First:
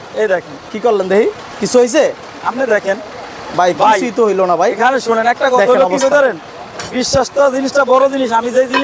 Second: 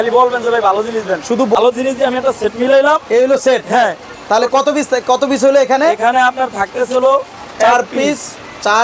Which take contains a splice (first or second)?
second